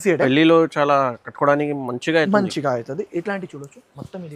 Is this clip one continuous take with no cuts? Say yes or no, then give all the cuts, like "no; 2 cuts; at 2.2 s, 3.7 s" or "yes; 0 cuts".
yes; 0 cuts